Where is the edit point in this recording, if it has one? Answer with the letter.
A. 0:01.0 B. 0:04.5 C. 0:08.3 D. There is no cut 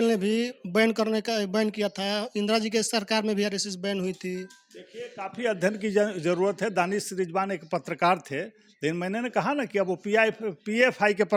D